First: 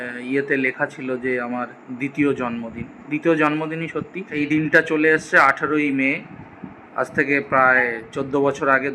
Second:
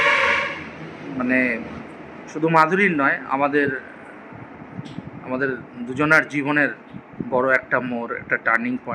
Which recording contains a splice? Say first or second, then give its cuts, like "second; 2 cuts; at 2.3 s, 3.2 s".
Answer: first; 1 cut; at 4.2 s